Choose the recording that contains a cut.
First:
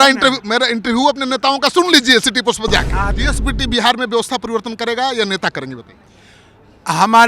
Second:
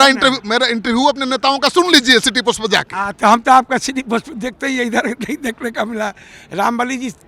first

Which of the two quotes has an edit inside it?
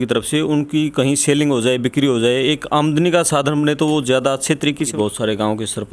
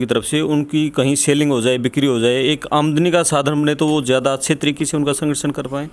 first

